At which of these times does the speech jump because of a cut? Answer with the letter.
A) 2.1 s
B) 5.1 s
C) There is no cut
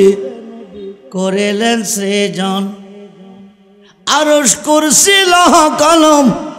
C